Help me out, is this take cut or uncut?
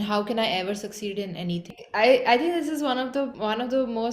cut